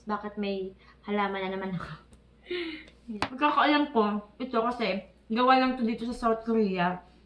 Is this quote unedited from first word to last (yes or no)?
no